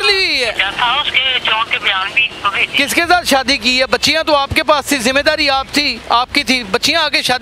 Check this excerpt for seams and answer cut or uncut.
uncut